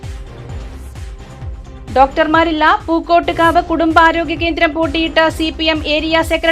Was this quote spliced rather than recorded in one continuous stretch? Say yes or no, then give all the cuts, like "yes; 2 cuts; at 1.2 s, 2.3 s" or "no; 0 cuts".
yes; 1 cut; at 1.6 s